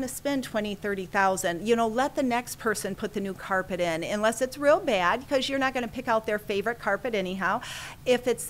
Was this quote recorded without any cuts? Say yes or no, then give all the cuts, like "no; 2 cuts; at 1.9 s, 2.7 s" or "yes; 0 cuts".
yes; 0 cuts